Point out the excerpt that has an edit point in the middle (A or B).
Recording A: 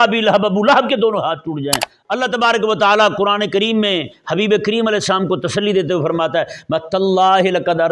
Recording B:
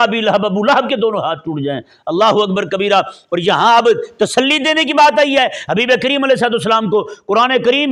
A